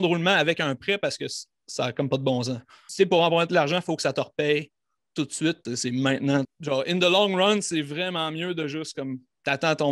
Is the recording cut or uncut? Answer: cut